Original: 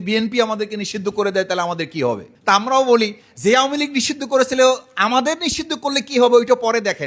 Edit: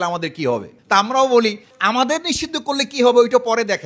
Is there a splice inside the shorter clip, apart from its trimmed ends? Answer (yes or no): yes